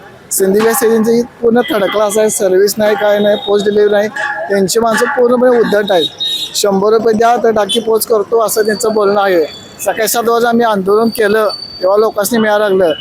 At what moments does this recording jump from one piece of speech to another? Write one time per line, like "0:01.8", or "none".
none